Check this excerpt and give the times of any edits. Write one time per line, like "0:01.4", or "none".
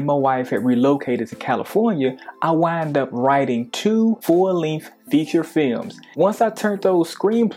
none